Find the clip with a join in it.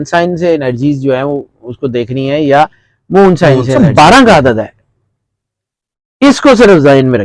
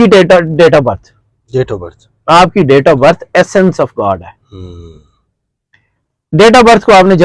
first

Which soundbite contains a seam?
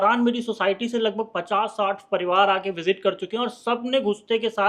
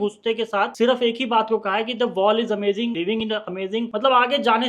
second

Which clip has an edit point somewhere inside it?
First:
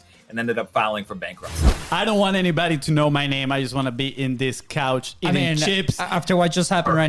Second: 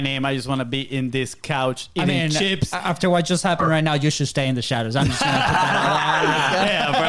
first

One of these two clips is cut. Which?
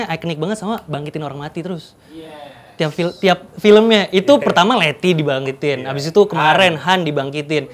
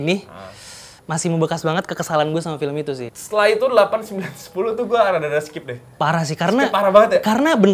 second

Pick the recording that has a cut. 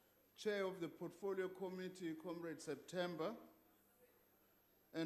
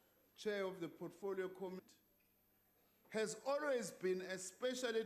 first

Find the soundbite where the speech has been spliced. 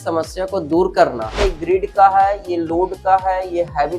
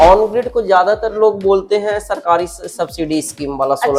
first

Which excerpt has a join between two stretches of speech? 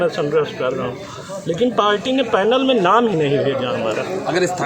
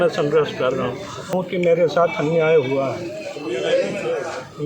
second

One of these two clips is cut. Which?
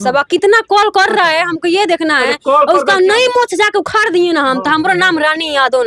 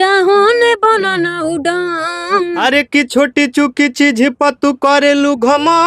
second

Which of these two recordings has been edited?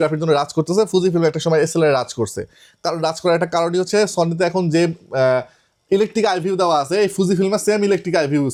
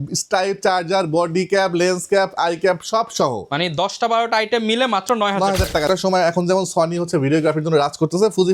second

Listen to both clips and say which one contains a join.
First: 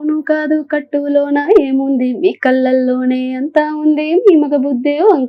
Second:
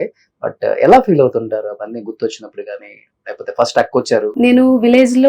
second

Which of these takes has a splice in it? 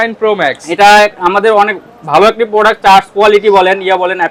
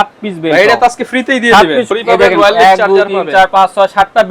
second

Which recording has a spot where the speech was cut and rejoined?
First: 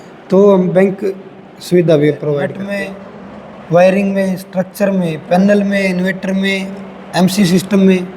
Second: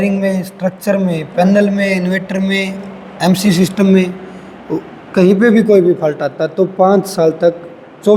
first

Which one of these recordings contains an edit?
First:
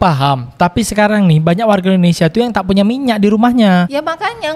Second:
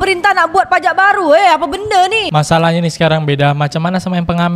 second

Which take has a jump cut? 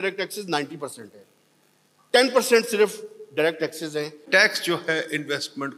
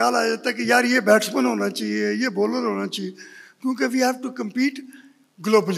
first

